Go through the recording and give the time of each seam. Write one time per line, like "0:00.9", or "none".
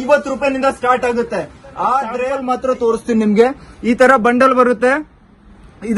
0:02.3